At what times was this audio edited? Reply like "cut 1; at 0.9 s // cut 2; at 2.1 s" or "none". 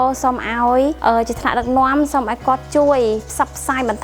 cut 1; at 1.0 s